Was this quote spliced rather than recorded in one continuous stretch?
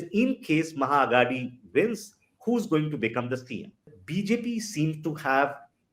yes; 1 cut; at 3.9 s

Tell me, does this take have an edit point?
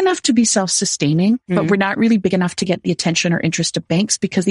no; 0 cuts

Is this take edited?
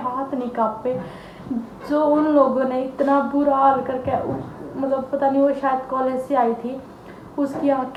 no; 0 cuts

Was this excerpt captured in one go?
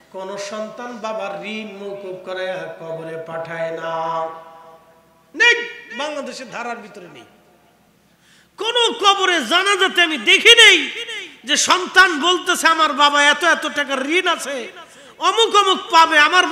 yes; 0 cuts

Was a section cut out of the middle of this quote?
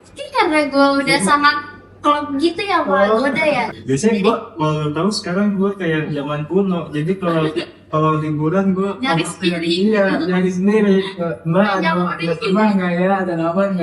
yes; 1 cut; at 3.8 s

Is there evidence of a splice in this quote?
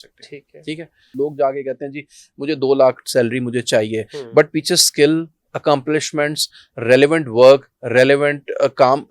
yes; 1 cut; at 1.1 s

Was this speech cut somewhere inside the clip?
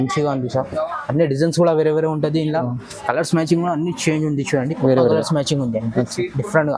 no; 0 cuts

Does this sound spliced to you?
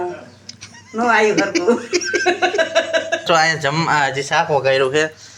yes; 1 cut; at 3.2 s

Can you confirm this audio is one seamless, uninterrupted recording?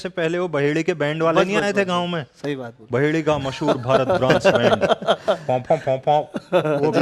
yes; 0 cuts

